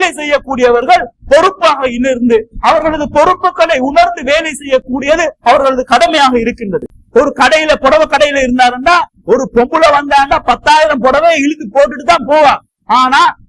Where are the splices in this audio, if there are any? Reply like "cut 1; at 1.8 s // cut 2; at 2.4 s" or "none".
cut 1; at 6.9 s